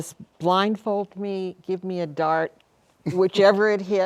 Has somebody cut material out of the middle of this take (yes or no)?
no